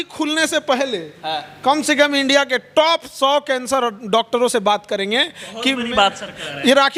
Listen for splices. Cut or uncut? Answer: uncut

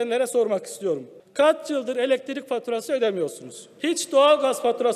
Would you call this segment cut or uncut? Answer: uncut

